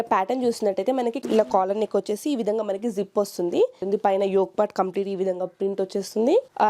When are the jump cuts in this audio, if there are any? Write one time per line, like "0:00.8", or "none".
0:01.2
0:03.8